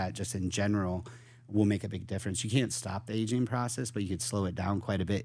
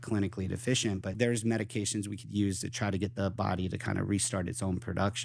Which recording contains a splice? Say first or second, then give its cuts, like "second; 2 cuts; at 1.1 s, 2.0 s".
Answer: second; 1 cut; at 1.1 s